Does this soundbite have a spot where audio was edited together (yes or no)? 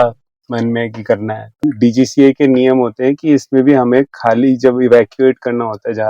yes